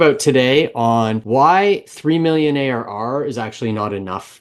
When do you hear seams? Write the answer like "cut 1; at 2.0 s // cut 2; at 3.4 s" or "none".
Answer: cut 1; at 1.2 s

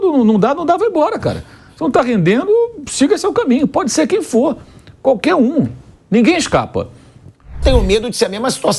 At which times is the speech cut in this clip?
cut 1; at 7.6 s

